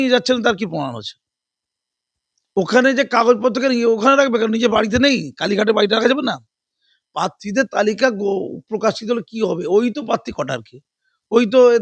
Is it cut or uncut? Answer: uncut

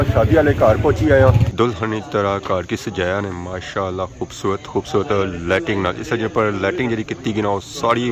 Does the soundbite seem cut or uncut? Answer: cut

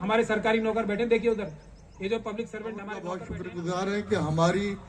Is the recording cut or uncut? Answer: cut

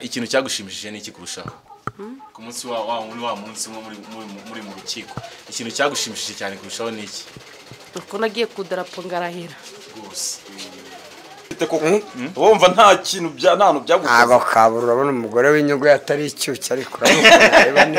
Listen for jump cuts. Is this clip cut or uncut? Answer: cut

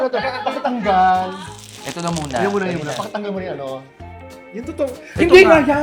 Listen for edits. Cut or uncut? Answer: uncut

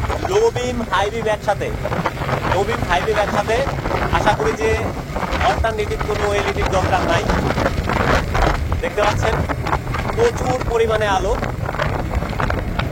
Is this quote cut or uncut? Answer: uncut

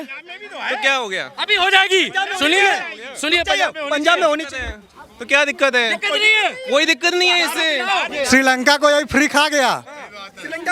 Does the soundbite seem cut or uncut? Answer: cut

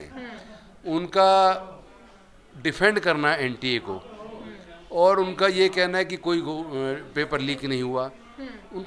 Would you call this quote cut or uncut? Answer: uncut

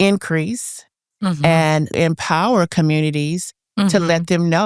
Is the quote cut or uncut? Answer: cut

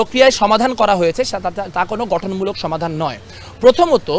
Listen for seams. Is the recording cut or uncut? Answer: uncut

